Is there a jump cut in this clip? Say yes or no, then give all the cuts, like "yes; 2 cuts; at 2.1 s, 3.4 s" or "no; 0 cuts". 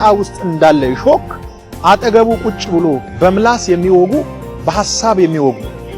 no; 0 cuts